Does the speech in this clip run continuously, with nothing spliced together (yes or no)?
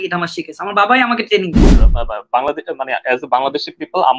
no